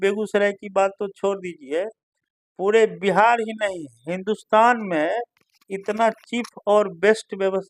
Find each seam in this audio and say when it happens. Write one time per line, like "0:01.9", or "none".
none